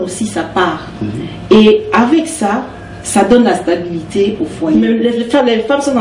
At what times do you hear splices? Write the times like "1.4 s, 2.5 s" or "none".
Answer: 5.0 s